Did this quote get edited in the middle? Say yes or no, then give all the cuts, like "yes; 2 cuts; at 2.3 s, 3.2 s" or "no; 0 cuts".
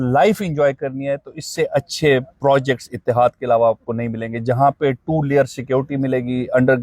no; 0 cuts